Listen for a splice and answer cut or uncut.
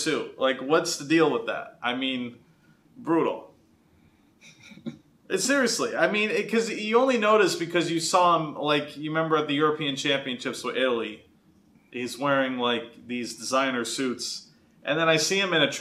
uncut